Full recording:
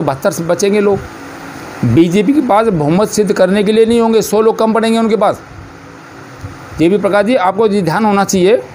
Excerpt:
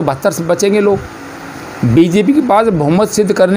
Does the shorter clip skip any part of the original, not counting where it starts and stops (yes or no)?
no